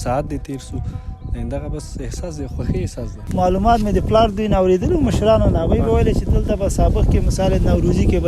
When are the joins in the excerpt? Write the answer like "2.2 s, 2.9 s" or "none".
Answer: 3.2 s